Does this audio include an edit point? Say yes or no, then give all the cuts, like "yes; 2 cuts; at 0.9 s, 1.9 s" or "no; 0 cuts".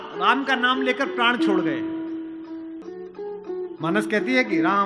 yes; 1 cut; at 2.8 s